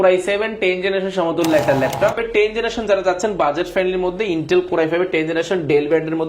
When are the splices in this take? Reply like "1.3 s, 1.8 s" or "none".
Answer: 2.2 s

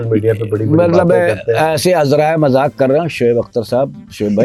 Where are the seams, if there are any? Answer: none

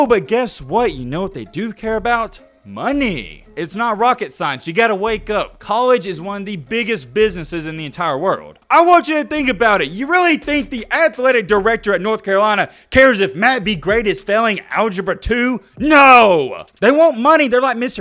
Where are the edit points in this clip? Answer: 3.4 s, 8.5 s, 16.6 s

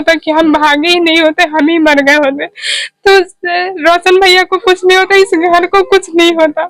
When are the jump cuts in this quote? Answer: none

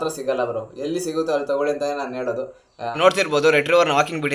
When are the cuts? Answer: 2.9 s

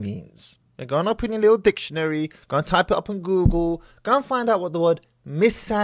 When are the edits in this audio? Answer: none

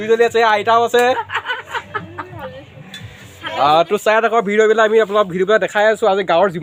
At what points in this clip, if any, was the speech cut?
none

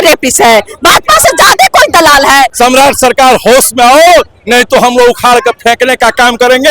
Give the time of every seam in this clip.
2.5 s

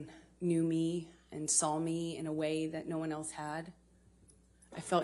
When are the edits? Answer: none

